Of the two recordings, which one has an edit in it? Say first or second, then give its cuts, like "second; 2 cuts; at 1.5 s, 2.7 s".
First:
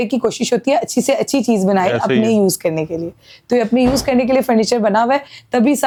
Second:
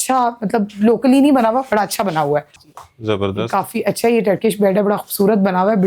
second; 1 cut; at 2.5 s